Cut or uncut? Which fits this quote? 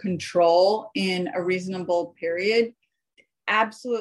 uncut